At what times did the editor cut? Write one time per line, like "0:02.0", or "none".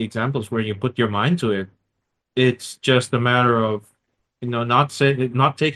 none